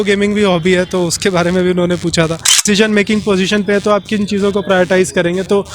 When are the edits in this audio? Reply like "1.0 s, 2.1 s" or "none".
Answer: 2.5 s